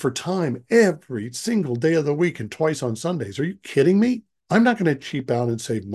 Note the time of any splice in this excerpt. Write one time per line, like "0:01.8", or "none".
0:04.3